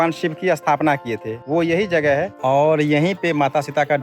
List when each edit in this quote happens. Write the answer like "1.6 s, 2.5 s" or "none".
1.3 s, 2.3 s